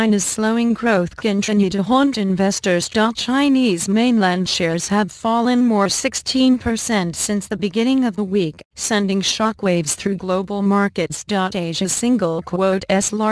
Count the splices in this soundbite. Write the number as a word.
zero